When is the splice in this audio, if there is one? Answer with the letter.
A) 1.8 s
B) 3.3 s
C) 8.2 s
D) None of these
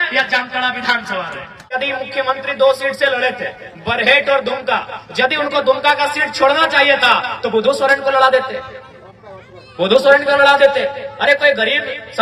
A